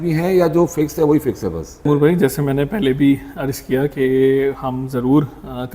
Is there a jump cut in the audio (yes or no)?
yes